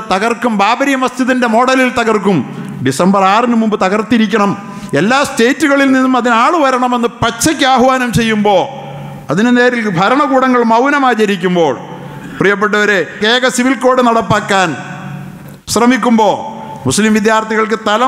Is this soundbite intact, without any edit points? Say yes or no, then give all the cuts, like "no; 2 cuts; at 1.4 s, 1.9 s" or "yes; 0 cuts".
no; 1 cut; at 13.2 s